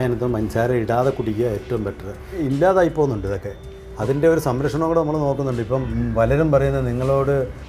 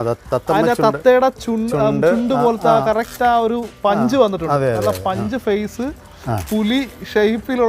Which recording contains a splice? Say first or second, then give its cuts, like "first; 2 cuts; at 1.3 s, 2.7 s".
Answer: first; 2 cuts; at 2.4 s, 5.9 s